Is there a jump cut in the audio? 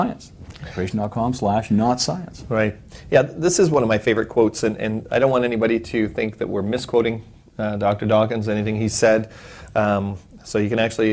yes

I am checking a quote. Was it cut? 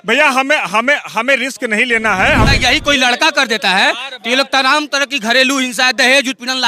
yes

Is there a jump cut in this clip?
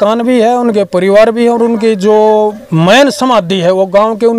no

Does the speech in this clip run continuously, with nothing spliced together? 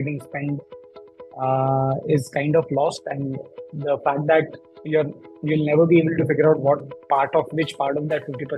yes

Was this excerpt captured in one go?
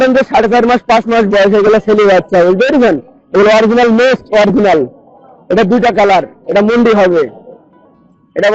yes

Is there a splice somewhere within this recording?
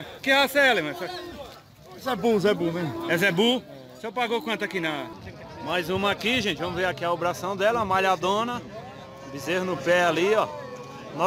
yes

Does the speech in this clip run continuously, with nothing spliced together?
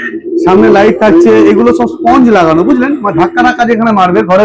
yes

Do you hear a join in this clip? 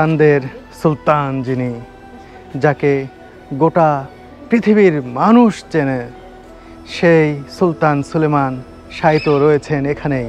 no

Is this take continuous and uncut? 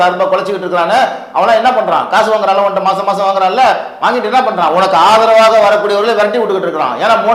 yes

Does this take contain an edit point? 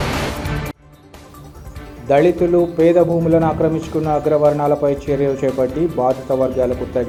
no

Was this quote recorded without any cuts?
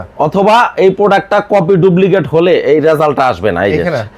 yes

